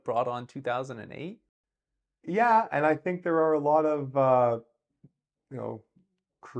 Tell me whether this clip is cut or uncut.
uncut